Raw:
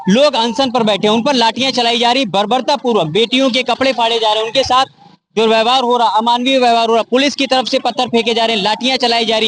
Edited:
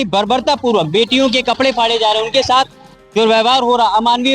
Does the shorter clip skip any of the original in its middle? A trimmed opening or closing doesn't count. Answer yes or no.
no